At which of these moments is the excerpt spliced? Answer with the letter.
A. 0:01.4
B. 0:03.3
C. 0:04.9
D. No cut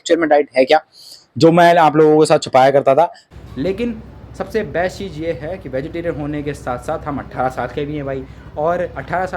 B